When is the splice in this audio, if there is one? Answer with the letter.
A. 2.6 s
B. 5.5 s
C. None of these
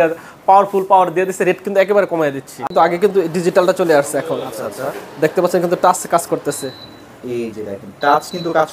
A